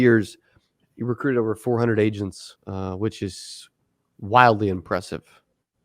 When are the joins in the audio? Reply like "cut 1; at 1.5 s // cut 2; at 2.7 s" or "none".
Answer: cut 1; at 2.5 s